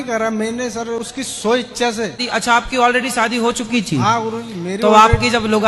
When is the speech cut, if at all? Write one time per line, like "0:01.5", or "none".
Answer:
0:01.1
0:02.2